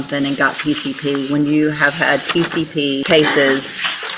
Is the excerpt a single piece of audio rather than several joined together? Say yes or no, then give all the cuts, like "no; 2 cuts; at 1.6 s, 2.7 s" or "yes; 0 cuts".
no; 1 cut; at 3.0 s